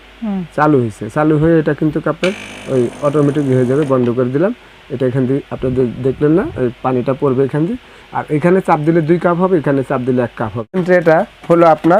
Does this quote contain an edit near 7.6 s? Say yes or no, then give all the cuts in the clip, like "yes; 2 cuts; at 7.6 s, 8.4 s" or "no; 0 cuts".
no; 1 cut; at 10.8 s